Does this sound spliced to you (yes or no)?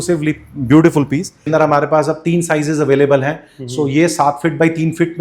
yes